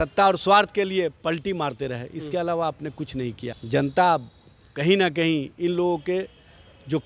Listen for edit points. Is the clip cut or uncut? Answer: cut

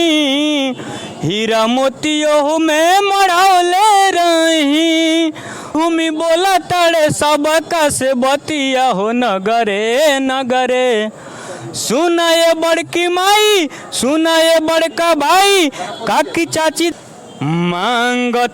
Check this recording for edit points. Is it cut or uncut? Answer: cut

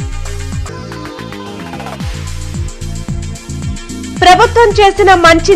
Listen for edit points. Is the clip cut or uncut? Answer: cut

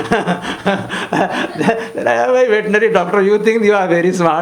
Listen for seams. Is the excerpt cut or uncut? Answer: uncut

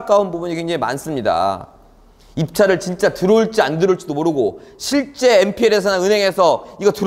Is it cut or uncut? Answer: uncut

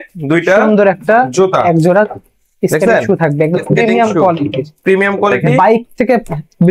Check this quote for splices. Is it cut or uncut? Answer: cut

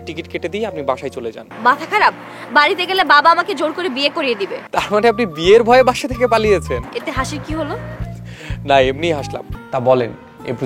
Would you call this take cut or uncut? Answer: cut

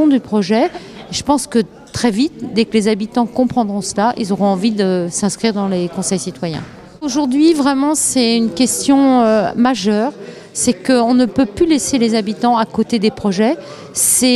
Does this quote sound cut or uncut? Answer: cut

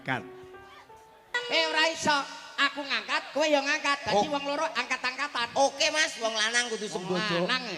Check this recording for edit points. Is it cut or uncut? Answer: cut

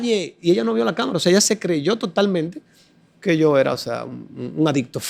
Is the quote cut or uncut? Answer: uncut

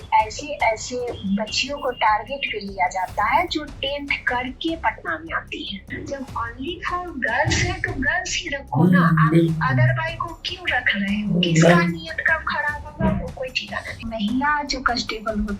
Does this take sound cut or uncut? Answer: cut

